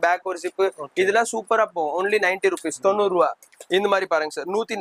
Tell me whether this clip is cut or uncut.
cut